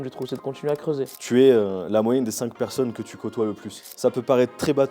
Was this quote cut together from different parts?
yes; 1 cut; at 1.1 s

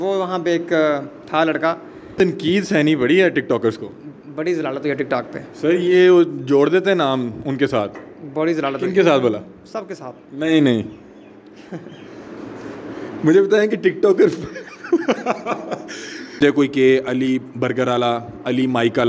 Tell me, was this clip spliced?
yes; 2 cuts; at 2.1 s, 16.4 s

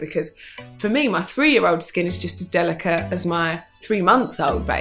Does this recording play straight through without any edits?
no; 1 cut; at 3.7 s

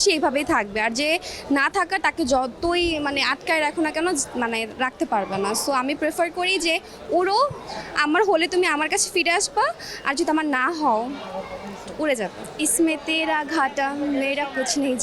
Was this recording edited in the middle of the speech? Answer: yes; 1 cut; at 12.4 s

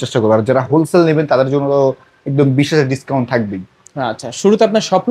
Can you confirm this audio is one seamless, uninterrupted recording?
yes; 0 cuts

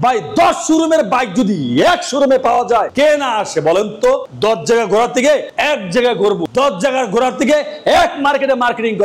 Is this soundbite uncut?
yes; 0 cuts

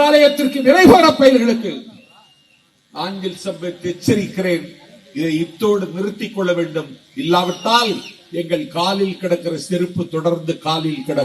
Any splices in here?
no; 0 cuts

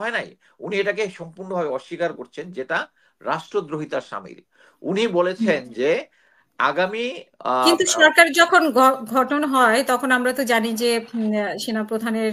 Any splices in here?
no; 0 cuts

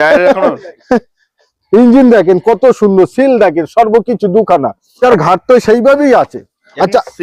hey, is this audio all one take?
no; 1 cut; at 5.0 s

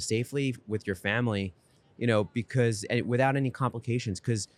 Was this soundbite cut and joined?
no; 0 cuts

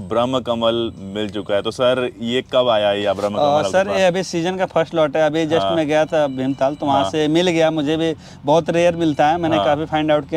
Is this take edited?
no; 0 cuts

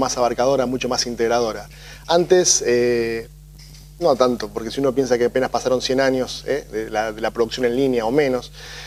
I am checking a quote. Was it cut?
no; 0 cuts

